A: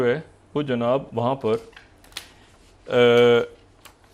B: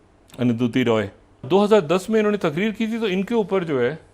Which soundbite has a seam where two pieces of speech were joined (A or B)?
B